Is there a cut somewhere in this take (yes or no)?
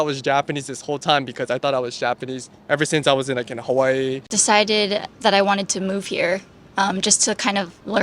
yes